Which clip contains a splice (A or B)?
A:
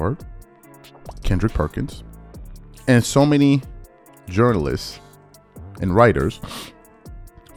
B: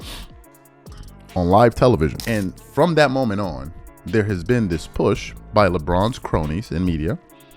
B